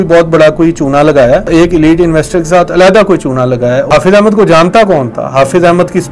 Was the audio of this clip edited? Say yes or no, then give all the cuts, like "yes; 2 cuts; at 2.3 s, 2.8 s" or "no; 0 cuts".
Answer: yes; 2 cuts; at 1.5 s, 3.9 s